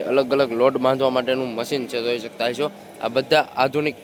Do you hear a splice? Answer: no; 0 cuts

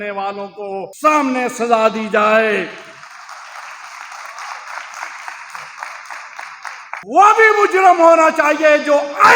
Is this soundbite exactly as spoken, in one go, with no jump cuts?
no; 2 cuts; at 0.9 s, 7.0 s

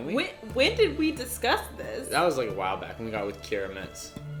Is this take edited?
no; 0 cuts

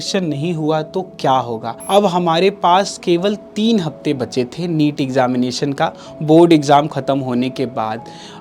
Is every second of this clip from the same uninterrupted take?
no; 1 cut; at 2.0 s

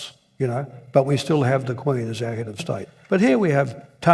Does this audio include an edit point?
yes; 1 cut; at 3.2 s

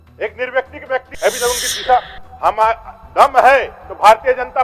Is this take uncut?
no; 1 cut; at 1.1 s

